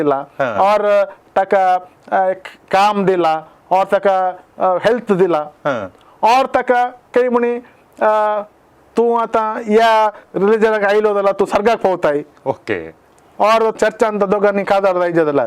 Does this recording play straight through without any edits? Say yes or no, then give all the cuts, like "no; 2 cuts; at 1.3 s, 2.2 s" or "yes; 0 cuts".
no; 1 cut; at 13.8 s